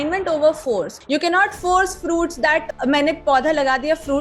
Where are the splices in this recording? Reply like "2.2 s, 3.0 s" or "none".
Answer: 1.0 s, 2.7 s